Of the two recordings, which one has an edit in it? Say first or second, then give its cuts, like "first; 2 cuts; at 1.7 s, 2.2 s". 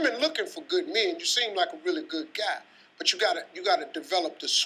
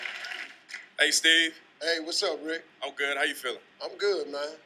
second; 1 cut; at 2.1 s